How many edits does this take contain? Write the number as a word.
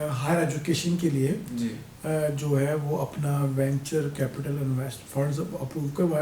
zero